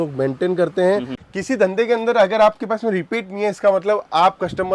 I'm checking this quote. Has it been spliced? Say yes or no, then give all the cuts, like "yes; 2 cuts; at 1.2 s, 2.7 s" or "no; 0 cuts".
yes; 1 cut; at 1.2 s